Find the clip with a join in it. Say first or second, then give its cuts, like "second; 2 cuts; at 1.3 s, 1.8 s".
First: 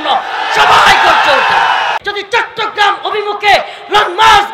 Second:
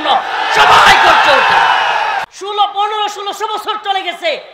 first; 1 cut; at 2.0 s